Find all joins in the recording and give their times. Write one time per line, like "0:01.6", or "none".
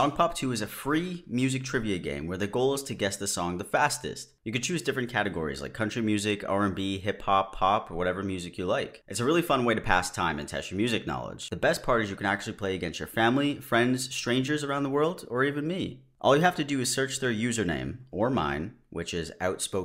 none